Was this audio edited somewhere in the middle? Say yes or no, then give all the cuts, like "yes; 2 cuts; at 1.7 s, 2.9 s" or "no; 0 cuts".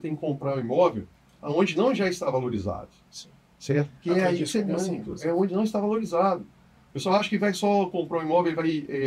no; 0 cuts